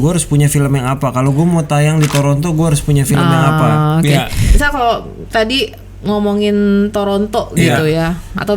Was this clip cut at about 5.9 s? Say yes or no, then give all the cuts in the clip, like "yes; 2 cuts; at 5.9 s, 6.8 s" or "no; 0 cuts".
no; 1 cut; at 4.5 s